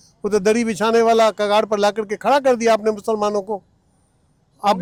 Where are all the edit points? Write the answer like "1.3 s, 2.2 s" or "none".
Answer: none